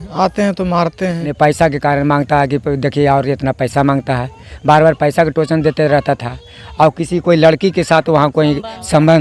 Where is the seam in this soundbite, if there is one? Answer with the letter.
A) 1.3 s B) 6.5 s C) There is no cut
A